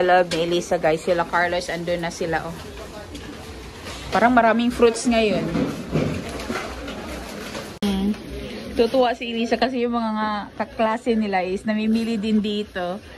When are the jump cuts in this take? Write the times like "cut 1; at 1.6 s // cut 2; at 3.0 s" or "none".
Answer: none